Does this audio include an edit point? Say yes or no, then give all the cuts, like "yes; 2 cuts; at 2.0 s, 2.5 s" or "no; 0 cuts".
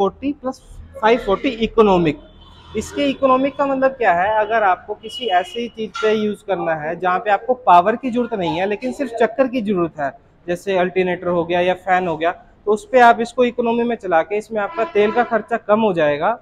no; 0 cuts